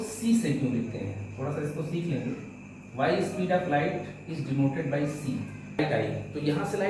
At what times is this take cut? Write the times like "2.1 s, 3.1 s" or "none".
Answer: 5.8 s